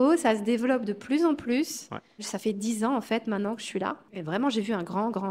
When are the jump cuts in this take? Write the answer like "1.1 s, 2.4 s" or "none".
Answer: 2.3 s, 4.1 s